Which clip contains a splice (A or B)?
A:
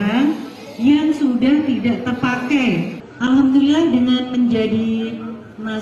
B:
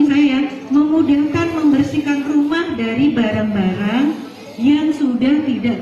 A